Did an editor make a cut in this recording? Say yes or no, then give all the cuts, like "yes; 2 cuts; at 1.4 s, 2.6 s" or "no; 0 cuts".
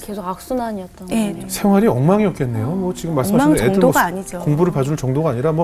yes; 1 cut; at 1.4 s